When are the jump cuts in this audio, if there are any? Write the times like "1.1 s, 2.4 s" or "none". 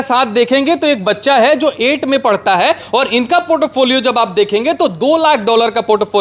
none